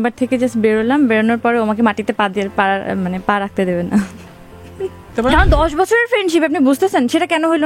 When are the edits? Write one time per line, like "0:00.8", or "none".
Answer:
0:05.1